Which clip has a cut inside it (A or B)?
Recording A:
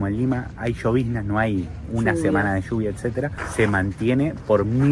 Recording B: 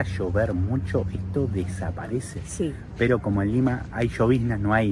A